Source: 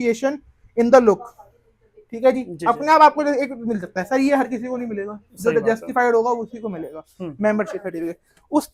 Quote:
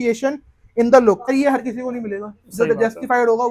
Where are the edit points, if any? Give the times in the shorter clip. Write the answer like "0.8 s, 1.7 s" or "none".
1.2 s